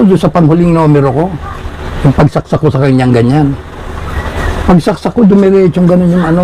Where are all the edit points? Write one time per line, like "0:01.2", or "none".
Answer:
none